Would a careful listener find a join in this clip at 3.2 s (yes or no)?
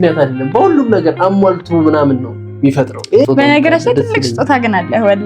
yes